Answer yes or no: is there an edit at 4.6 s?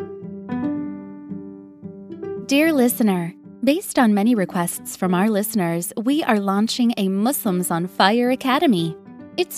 no